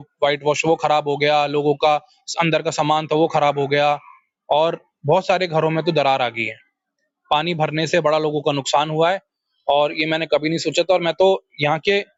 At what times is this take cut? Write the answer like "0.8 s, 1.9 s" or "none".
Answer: none